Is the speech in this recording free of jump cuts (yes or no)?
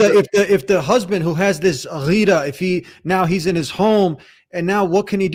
yes